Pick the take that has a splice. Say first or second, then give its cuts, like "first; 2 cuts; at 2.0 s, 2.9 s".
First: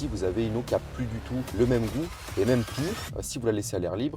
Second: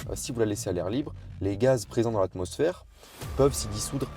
first; 1 cut; at 1.5 s